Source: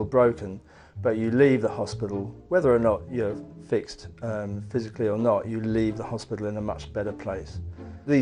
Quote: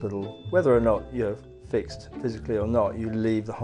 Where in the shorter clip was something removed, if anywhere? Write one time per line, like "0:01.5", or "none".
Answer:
0:02.1